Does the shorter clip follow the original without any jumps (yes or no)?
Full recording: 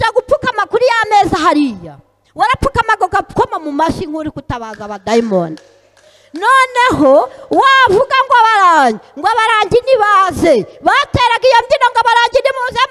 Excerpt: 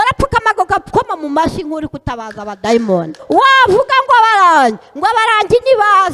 no